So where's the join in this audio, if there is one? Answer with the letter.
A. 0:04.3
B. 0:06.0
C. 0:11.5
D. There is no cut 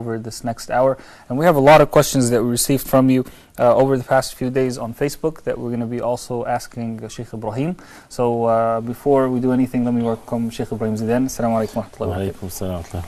D